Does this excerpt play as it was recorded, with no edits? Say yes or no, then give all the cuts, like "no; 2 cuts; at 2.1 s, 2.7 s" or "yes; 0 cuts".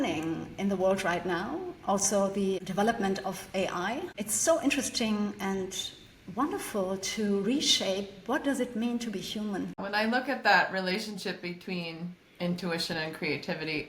no; 1 cut; at 9.8 s